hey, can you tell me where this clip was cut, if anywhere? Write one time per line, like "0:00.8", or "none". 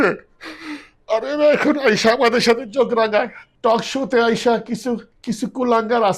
0:03.4
0:05.1